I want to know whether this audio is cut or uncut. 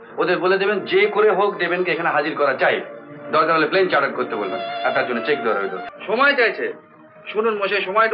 cut